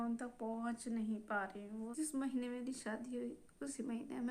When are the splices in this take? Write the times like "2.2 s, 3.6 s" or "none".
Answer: 1.9 s